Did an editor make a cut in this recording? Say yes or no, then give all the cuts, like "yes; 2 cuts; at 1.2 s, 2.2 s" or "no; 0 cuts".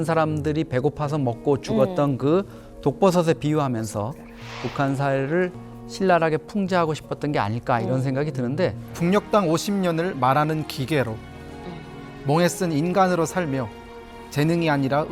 yes; 1 cut; at 8.8 s